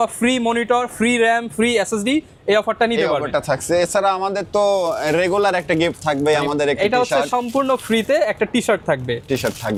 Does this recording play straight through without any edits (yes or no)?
yes